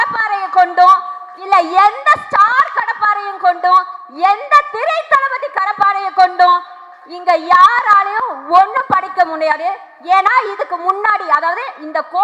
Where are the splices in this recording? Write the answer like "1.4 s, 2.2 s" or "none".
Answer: none

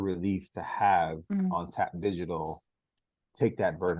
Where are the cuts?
none

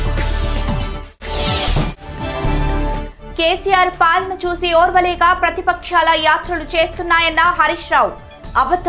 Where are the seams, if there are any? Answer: 1.1 s

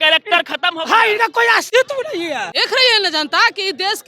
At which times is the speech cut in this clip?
1.7 s, 2.5 s

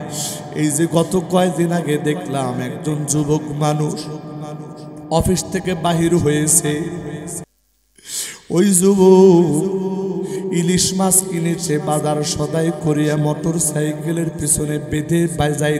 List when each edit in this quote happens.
7.4 s

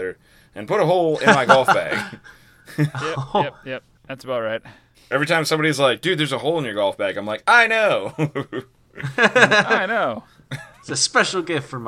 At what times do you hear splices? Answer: 5.1 s

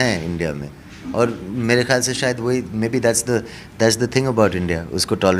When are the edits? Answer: none

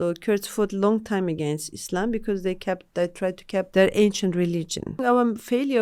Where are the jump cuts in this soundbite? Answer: 3.7 s, 4.9 s

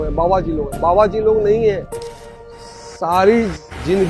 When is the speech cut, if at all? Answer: 2.3 s

